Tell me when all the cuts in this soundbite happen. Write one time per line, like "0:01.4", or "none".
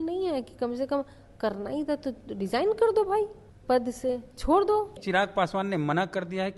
0:03.5
0:05.0